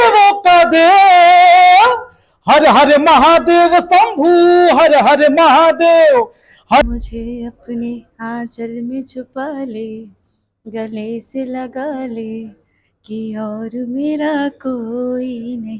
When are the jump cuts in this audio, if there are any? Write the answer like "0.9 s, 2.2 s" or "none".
6.8 s